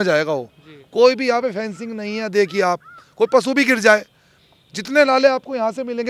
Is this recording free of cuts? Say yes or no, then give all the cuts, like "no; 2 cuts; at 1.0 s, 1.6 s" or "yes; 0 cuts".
yes; 0 cuts